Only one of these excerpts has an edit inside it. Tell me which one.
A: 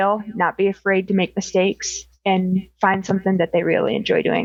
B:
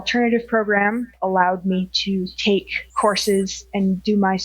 B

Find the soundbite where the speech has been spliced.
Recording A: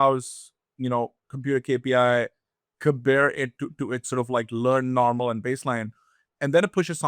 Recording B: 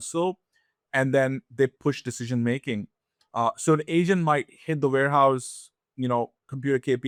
A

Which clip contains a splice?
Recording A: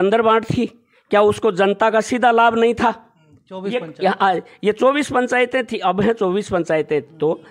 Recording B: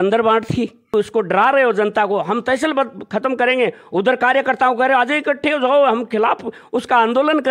B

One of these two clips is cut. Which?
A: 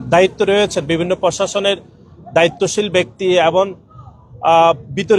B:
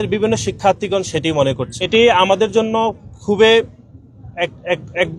B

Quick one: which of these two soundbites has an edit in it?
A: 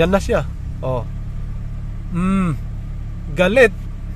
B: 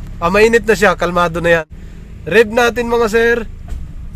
B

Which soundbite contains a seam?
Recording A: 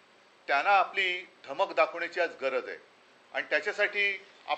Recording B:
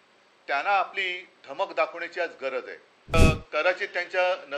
B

